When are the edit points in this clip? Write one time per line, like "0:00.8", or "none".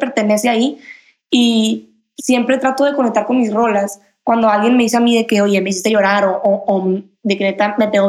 0:02.0